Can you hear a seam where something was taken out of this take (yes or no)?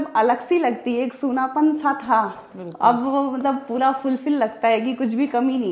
no